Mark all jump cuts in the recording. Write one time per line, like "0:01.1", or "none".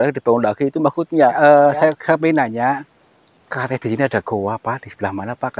0:01.4